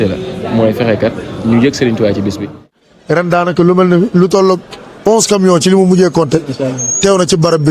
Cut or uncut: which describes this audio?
cut